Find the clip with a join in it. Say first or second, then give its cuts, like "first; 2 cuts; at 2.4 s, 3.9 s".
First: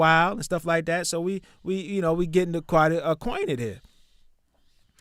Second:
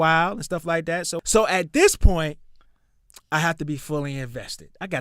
second; 1 cut; at 1.1 s